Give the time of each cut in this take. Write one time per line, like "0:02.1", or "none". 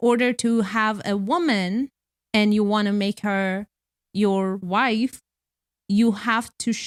none